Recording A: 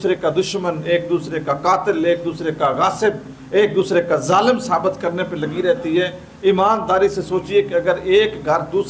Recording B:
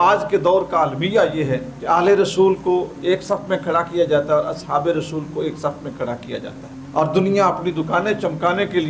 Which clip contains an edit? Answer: B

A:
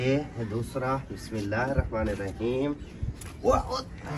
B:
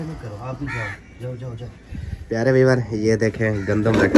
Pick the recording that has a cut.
B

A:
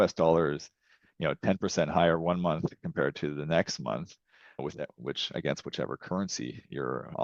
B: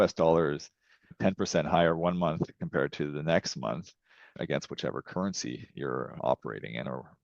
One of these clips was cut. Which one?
B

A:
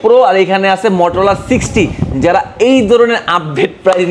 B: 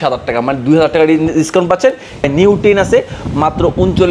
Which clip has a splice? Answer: B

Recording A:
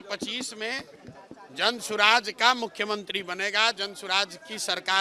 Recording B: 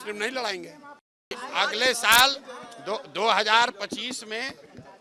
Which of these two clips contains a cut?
B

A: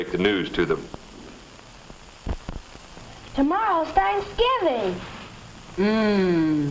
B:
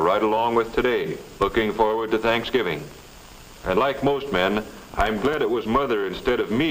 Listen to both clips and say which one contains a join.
A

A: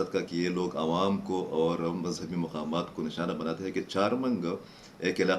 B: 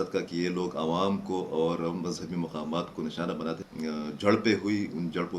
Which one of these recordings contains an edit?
B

